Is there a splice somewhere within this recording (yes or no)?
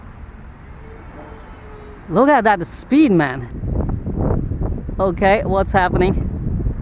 yes